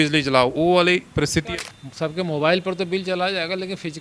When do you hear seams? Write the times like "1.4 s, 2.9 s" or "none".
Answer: 1.6 s